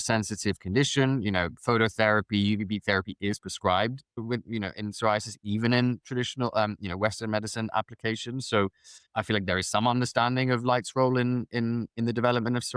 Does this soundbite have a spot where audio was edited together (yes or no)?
no